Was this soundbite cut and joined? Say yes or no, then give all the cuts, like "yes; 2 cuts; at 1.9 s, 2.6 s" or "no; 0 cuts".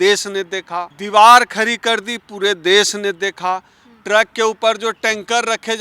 yes; 1 cut; at 1.0 s